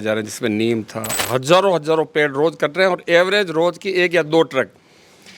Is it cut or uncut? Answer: cut